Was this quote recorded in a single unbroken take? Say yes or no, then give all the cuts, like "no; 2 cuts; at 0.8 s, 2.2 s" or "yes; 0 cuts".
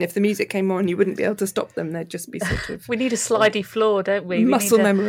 yes; 0 cuts